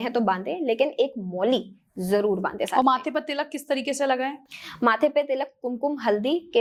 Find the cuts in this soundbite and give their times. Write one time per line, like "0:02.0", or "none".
none